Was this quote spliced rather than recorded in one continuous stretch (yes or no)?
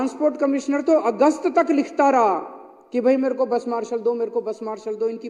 no